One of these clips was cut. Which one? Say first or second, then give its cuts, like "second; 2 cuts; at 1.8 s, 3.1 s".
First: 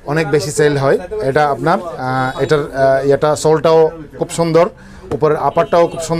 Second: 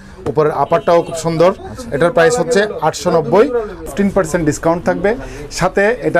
second; 1 cut; at 3.8 s